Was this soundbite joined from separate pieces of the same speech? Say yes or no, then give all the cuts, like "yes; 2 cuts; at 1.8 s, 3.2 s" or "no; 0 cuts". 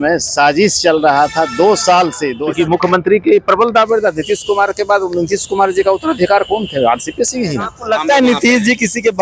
yes; 2 cuts; at 2.3 s, 7.7 s